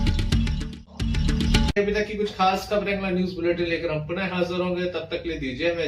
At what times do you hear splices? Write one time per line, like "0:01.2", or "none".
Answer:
none